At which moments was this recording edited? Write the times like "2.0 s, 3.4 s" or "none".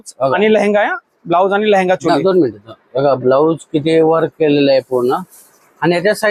none